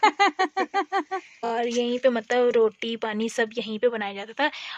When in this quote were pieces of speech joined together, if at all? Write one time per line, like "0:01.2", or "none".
0:01.5